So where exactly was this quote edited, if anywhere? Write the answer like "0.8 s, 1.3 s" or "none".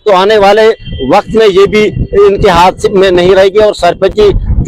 none